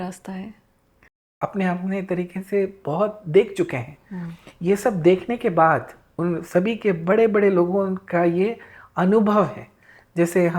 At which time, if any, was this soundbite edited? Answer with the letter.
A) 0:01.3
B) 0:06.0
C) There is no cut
A